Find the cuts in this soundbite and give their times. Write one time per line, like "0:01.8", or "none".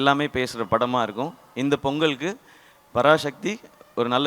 none